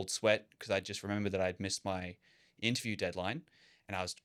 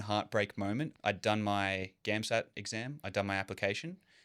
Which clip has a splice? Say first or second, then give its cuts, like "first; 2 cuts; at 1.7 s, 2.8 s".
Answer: second; 1 cut; at 0.9 s